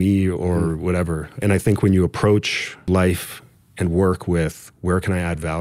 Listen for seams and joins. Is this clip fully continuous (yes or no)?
no